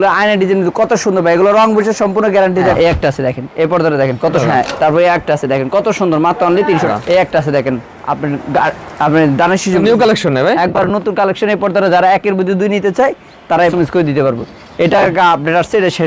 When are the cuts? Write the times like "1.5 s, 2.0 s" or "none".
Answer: 2.7 s, 4.4 s, 6.9 s, 9.8 s, 13.7 s